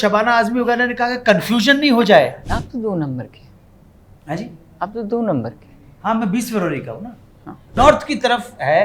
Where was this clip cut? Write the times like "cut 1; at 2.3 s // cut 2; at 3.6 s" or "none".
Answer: cut 1; at 2.5 s // cut 2; at 7.7 s